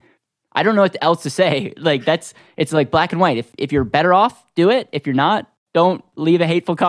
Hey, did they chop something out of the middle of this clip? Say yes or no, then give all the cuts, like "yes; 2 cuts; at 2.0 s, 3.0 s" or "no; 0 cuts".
yes; 2 cuts; at 3.5 s, 5.6 s